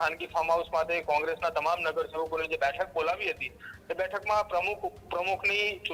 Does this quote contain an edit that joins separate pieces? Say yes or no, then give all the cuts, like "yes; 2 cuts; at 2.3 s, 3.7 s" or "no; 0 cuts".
no; 0 cuts